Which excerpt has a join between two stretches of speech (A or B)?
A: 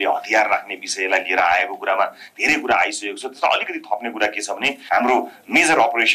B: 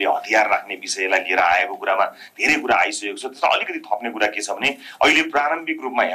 A